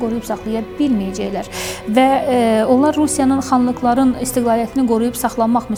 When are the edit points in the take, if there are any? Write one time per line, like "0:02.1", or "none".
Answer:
none